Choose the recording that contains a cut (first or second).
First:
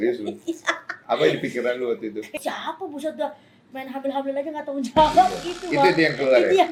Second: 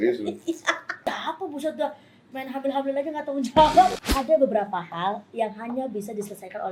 second